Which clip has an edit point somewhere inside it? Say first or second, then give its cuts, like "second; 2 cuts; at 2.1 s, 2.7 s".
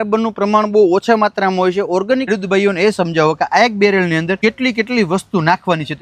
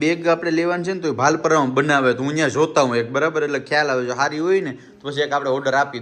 first; 2 cuts; at 2.3 s, 4.4 s